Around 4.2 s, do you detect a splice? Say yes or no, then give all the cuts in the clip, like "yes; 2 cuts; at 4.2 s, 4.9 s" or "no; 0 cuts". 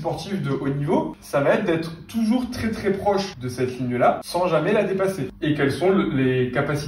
yes; 4 cuts; at 1.2 s, 3.4 s, 4.2 s, 5.3 s